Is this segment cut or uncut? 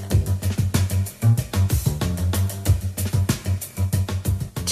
cut